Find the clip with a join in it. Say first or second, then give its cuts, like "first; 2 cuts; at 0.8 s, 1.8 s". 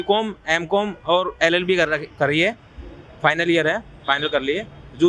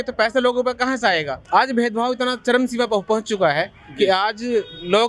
second; 1 cut; at 1.3 s